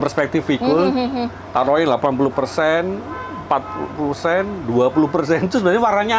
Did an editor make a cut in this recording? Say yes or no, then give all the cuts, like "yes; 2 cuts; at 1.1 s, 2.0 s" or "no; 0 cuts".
no; 0 cuts